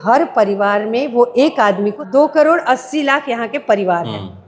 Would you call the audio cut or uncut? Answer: cut